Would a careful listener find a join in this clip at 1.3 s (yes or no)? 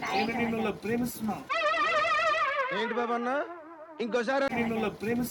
no